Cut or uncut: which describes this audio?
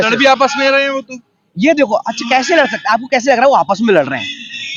uncut